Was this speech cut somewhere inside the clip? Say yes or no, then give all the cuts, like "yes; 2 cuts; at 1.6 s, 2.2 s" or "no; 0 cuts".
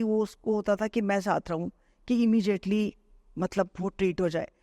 no; 0 cuts